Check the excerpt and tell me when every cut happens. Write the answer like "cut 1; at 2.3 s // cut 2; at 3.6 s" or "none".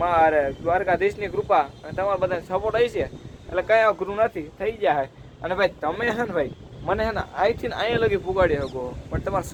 none